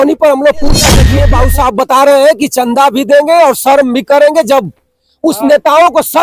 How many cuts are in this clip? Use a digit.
1